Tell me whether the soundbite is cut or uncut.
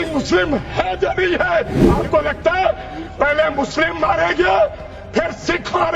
cut